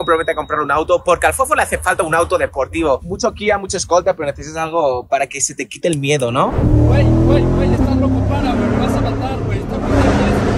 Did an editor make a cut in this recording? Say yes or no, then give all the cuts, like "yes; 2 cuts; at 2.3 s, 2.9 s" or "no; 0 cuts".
no; 0 cuts